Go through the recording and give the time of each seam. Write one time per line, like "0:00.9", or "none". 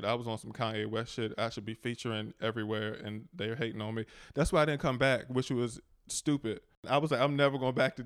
0:06.8